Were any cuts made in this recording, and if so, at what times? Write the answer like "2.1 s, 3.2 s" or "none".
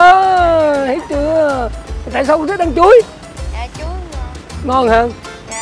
none